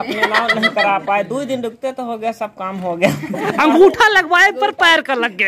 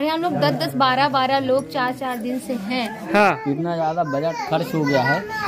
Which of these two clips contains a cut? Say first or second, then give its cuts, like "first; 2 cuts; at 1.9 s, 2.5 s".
second; 1 cut; at 3.0 s